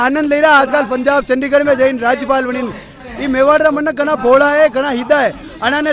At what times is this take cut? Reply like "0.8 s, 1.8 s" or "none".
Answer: 3.0 s